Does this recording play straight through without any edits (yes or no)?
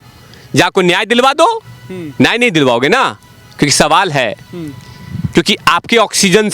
yes